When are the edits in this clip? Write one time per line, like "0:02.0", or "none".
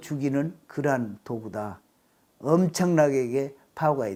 none